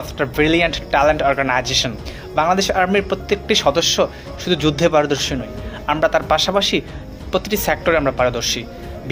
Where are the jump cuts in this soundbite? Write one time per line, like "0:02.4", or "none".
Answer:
0:02.1